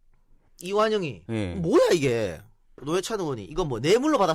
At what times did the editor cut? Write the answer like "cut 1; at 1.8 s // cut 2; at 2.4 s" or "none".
cut 1; at 2.8 s